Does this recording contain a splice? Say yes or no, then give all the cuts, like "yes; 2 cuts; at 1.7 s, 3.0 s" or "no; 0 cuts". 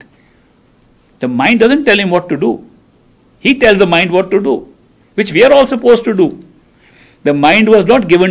no; 0 cuts